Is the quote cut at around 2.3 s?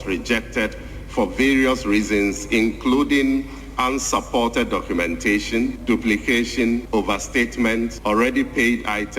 no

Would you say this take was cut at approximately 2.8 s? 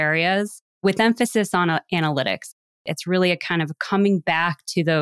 yes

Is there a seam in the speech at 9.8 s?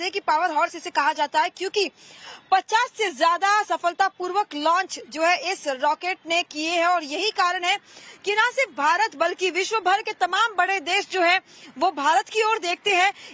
no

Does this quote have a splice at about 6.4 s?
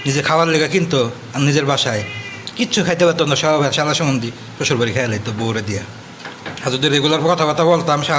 yes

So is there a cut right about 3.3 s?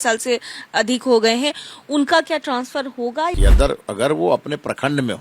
yes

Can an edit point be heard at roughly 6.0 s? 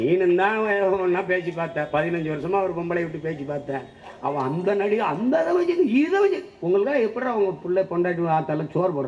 no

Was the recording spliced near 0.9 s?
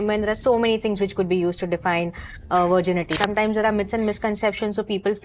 no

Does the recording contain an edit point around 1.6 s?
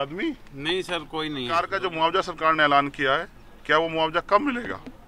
yes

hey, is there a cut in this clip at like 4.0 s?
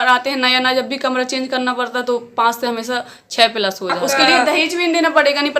yes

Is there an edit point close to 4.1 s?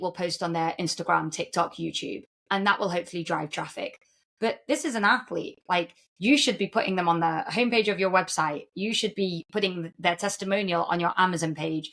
no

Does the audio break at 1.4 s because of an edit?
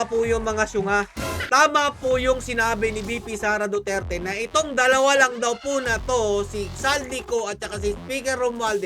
yes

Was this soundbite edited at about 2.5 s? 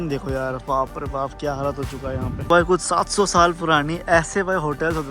yes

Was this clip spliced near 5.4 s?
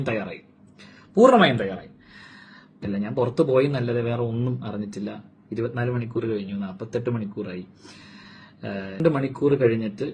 no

